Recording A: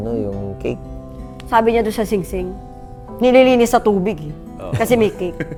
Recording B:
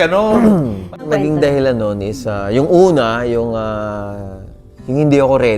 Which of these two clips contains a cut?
B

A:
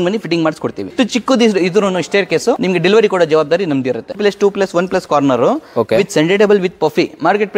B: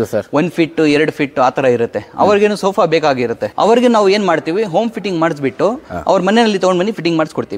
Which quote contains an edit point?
A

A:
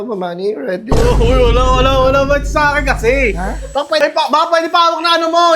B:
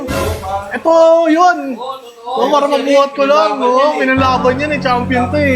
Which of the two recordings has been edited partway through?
A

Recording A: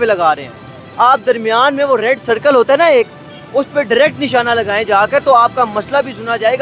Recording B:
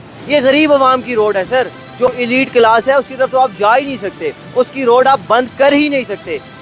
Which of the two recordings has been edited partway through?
B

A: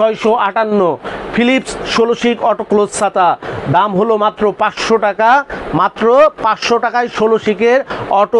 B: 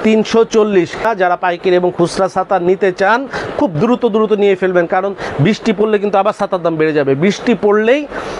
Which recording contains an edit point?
B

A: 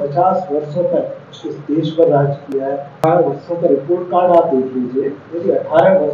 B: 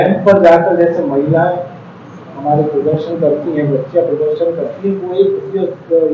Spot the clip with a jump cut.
A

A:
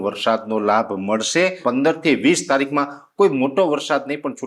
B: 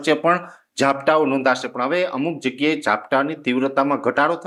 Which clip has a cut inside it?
A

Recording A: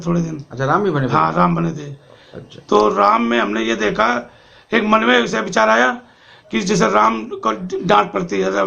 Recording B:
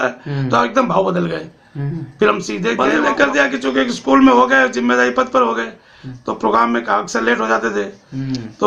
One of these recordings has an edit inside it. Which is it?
B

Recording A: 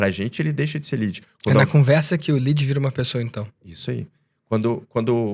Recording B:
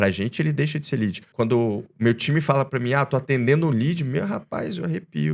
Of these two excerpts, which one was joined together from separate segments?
B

